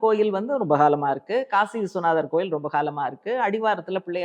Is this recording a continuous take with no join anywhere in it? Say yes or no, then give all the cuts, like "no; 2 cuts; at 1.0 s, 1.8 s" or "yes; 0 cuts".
yes; 0 cuts